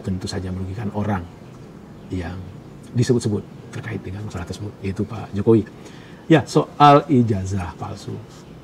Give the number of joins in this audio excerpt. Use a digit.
0